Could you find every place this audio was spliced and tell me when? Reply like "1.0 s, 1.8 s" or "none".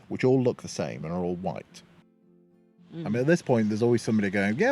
2.3 s

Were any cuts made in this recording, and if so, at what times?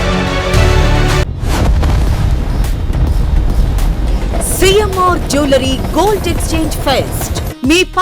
1.2 s

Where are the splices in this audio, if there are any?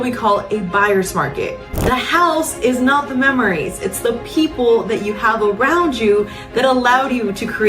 1.6 s

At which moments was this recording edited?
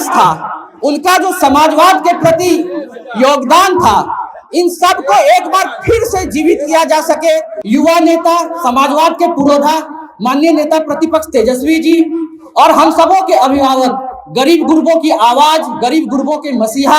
7.5 s

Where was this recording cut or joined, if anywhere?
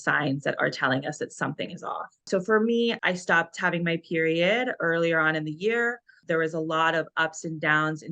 3.0 s

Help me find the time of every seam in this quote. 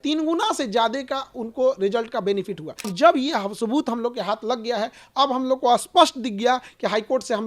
2.9 s

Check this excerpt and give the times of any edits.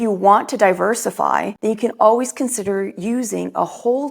1.5 s

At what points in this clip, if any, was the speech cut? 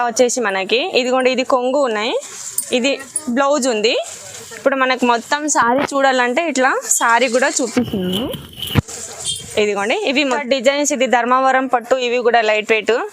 10.4 s

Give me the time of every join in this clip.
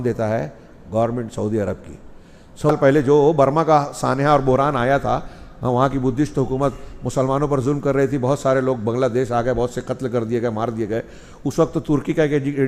2.7 s

